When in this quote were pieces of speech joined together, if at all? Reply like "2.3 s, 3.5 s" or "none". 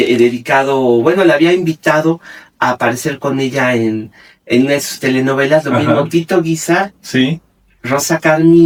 none